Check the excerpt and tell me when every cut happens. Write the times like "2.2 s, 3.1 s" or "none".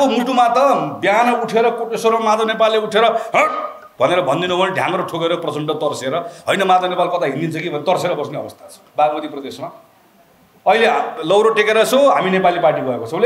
8.8 s